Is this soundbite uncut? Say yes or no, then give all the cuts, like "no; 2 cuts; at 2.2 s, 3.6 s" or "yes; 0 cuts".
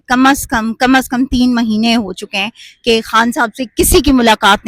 yes; 0 cuts